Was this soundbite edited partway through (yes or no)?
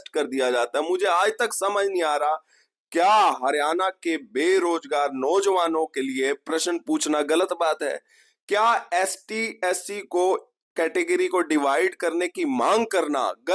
no